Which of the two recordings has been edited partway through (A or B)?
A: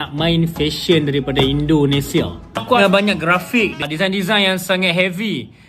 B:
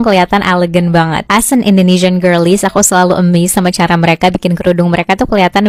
A